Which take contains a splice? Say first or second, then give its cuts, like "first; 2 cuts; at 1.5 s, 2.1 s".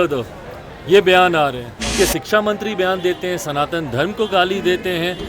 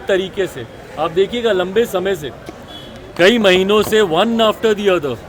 first; 1 cut; at 1.9 s